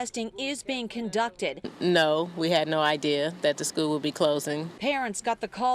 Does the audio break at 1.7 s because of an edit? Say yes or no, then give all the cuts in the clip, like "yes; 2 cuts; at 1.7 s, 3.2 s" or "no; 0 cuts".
yes; 1 cut; at 1.7 s